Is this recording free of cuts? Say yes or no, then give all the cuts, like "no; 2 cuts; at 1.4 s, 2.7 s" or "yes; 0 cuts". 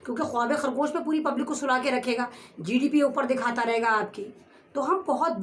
yes; 0 cuts